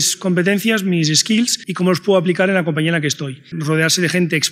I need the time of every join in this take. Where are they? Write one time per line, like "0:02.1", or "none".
0:01.6
0:03.5